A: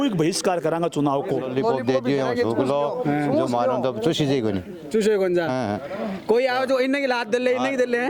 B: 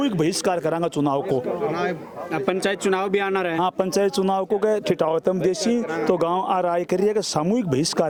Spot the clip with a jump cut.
A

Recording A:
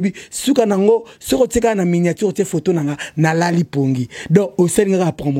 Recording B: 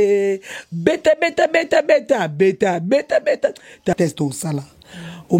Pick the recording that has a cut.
B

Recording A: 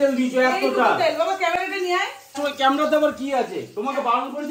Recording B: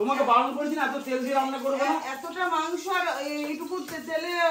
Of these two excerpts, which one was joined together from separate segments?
A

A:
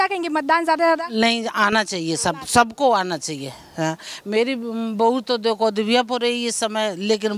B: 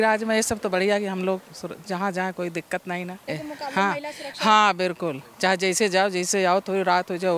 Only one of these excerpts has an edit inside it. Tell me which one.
B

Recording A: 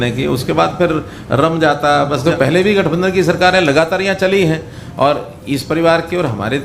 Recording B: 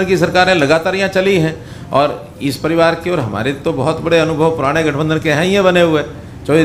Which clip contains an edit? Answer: A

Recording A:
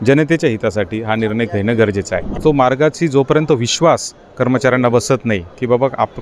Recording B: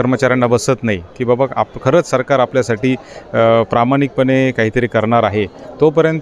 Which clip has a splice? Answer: A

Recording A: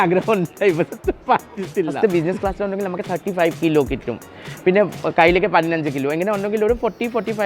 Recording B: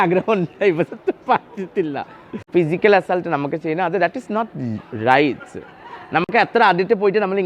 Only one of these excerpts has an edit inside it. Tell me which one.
A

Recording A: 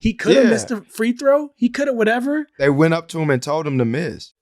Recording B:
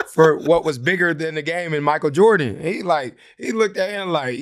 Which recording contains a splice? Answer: A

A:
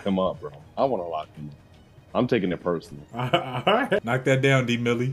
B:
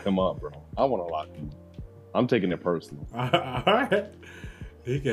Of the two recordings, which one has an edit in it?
A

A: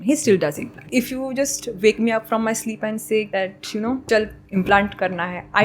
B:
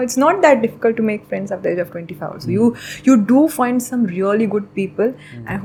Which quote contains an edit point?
A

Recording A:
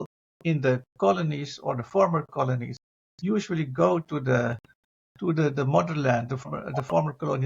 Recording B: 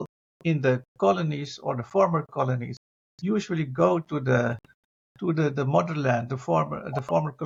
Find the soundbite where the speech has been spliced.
A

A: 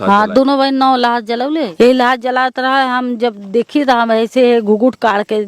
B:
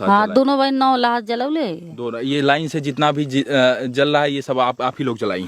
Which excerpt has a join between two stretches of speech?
A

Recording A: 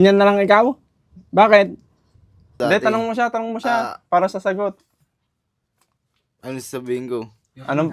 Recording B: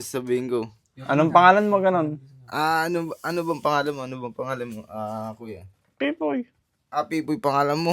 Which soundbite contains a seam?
A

